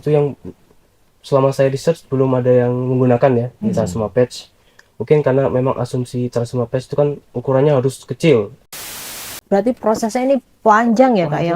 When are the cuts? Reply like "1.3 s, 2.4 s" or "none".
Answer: 8.9 s